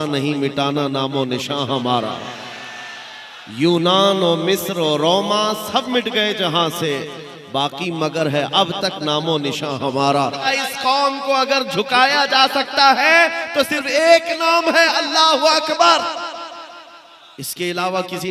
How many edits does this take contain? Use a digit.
1